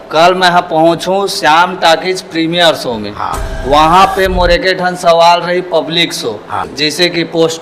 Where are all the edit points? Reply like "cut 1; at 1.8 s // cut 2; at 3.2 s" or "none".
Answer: cut 1; at 6.7 s